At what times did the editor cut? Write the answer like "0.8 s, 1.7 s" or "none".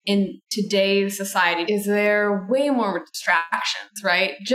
1.6 s